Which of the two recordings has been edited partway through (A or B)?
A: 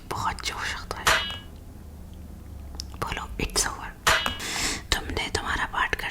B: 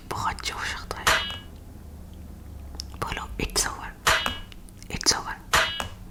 A